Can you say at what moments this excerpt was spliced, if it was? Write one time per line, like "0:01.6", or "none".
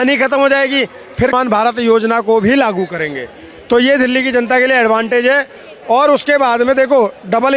0:01.3